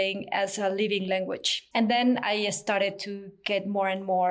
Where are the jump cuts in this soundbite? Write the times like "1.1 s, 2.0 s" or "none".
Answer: 1.6 s